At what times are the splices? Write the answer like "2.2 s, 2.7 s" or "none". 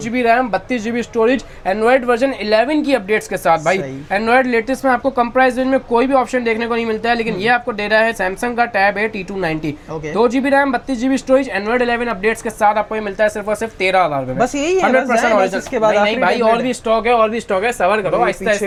none